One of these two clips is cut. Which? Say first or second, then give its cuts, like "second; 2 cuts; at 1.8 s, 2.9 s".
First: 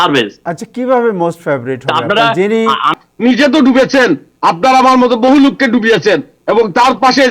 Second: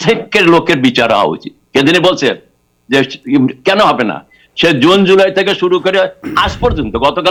first; 1 cut; at 2.9 s